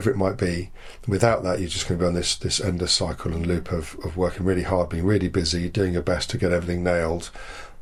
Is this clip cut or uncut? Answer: uncut